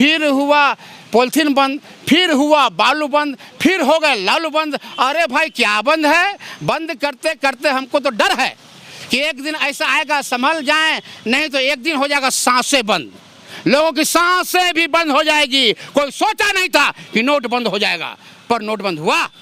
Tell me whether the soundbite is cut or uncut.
uncut